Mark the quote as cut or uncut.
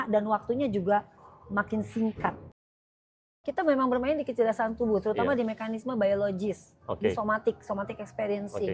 cut